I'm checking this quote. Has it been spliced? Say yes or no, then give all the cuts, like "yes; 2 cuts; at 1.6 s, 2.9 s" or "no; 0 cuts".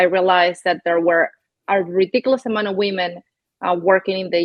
no; 0 cuts